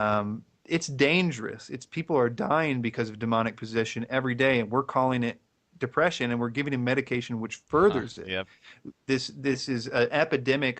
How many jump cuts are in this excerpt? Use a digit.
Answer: 1